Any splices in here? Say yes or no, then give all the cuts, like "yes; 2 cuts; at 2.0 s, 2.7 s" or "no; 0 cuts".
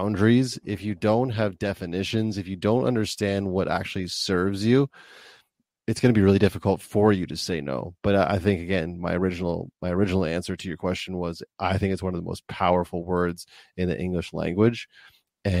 no; 0 cuts